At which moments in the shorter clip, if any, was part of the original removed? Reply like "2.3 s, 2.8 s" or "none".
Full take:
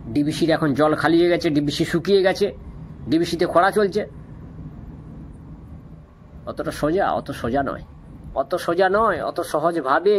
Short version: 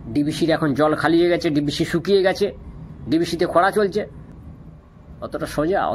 4.3 s